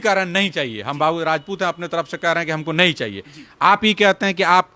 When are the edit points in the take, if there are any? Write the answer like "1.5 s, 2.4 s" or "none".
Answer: none

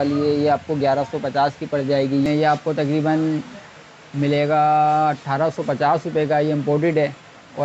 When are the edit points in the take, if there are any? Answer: 2.2 s

